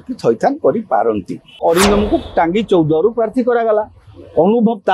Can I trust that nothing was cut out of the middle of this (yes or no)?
no